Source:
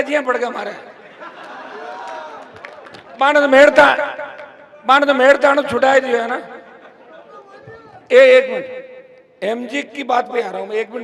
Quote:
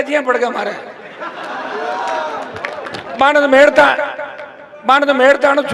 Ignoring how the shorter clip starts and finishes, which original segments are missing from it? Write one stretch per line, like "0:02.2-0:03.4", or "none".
none